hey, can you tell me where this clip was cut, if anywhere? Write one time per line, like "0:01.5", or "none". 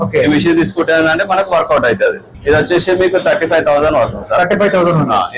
0:02.3